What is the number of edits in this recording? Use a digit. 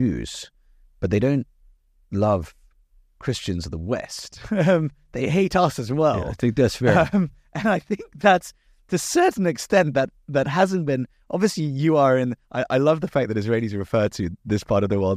0